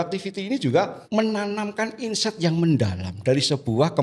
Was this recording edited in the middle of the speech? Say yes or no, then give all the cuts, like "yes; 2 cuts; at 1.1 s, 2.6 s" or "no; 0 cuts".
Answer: yes; 1 cut; at 1.0 s